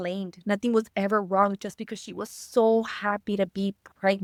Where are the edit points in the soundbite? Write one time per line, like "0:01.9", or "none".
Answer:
none